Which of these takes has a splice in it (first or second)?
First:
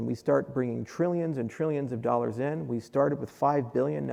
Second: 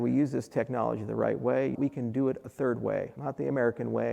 second